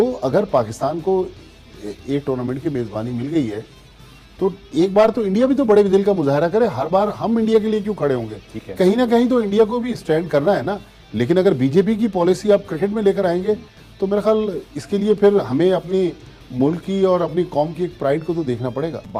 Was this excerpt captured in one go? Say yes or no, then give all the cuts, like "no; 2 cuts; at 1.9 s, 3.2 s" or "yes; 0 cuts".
yes; 0 cuts